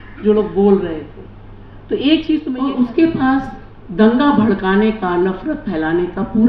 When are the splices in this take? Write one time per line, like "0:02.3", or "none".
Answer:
0:02.5